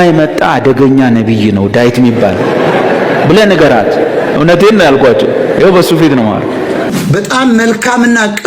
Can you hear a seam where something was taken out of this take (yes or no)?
yes